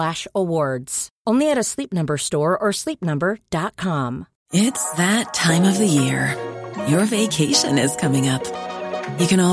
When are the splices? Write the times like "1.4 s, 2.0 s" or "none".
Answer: 4.3 s

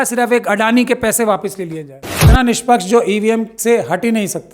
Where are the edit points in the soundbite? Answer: 2.4 s

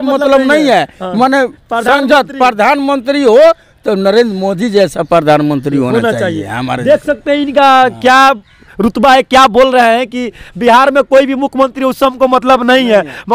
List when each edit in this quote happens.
none

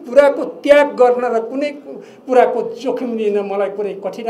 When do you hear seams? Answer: none

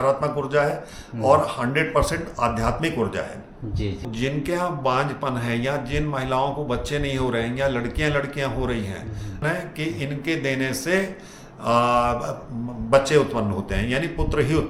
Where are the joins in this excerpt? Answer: 4.1 s, 9.4 s

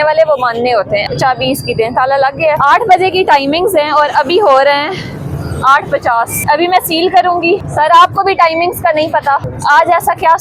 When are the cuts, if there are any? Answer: 1.1 s, 2.6 s, 6.4 s, 7.7 s, 9.5 s

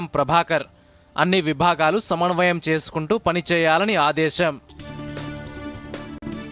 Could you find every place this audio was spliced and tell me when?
none

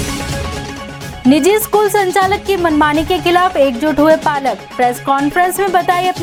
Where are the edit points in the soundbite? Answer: none

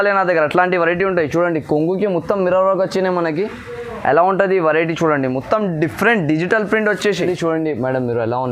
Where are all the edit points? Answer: 7.2 s

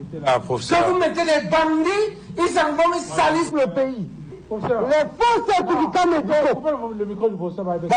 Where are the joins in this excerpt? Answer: 4.4 s

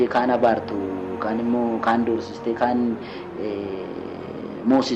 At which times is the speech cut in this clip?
none

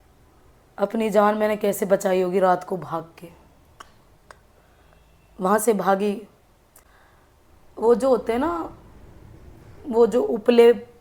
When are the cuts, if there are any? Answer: none

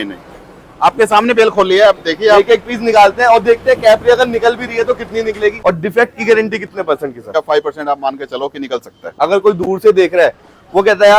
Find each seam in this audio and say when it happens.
5.6 s, 7.3 s, 9.0 s

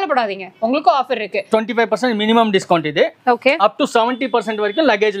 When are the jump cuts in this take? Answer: 1.5 s

